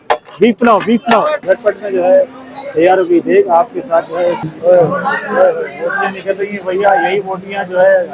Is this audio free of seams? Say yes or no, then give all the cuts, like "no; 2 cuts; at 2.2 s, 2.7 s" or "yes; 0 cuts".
no; 2 cuts; at 1.4 s, 4.5 s